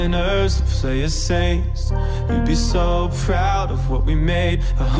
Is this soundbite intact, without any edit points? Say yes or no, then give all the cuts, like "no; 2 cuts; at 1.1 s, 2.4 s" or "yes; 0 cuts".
yes; 0 cuts